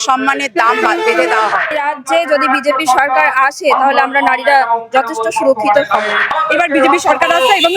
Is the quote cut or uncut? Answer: cut